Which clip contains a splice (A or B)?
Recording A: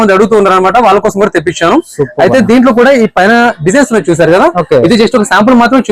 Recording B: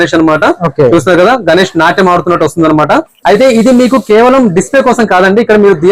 B